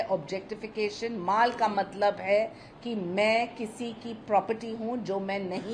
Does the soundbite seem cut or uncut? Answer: uncut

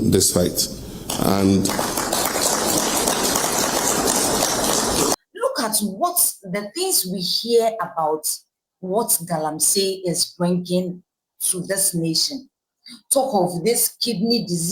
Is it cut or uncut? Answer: cut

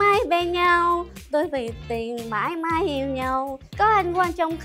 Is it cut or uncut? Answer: cut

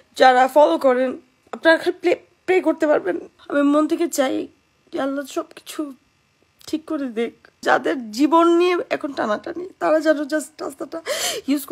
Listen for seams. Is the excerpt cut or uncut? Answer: cut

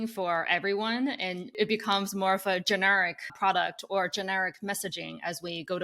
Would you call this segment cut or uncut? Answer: cut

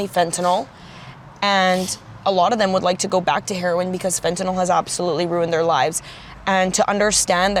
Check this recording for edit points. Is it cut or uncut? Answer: uncut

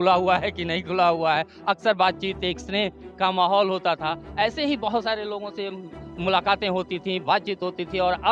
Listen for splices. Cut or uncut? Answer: uncut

